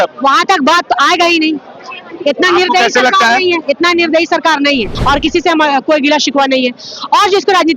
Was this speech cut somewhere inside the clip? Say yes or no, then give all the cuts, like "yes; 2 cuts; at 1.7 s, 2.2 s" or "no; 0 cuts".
yes; 1 cut; at 4.9 s